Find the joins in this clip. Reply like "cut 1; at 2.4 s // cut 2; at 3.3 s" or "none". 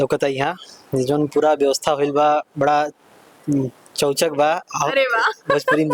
none